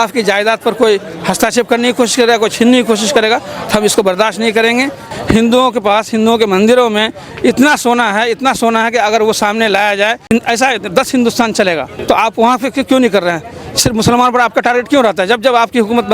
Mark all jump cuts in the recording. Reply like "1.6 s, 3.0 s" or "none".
5.1 s, 10.3 s, 11.9 s